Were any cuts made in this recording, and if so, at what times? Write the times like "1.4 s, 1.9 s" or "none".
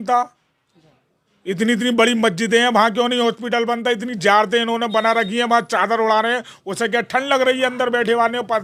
none